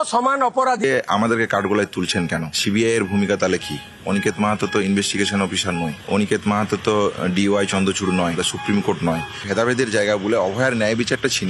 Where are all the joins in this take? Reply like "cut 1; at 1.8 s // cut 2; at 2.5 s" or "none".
cut 1; at 0.8 s // cut 2; at 9.3 s